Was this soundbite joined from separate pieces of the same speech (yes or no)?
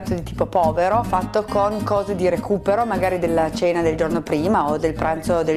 no